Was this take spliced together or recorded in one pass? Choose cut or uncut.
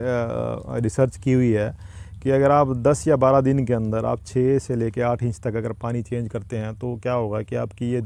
uncut